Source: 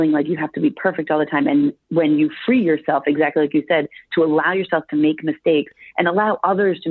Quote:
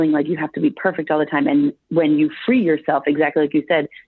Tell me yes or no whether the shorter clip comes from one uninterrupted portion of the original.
yes